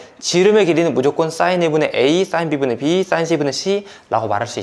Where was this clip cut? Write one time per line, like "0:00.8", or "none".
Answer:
none

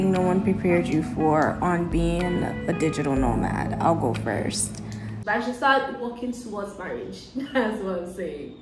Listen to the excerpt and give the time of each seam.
0:05.1

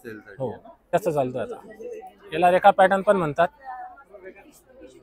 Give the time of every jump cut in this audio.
0:00.9

